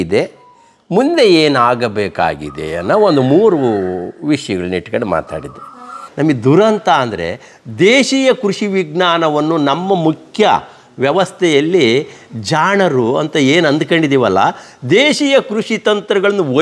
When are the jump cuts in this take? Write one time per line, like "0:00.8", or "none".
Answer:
0:06.0

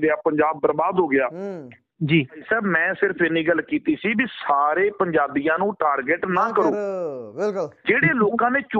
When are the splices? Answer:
0:02.4

